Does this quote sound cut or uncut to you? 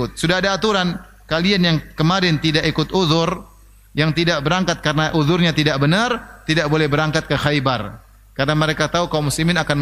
uncut